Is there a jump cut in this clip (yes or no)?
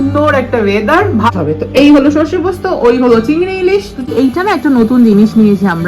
yes